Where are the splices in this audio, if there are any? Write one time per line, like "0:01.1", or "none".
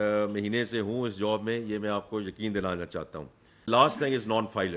0:03.7